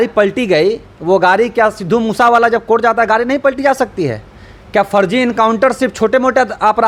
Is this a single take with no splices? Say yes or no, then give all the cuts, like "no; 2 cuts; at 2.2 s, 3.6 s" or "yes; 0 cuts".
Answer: yes; 0 cuts